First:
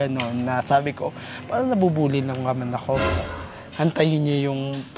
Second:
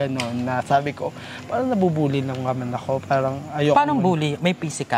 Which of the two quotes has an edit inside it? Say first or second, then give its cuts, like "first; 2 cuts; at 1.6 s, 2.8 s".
first; 1 cut; at 3.0 s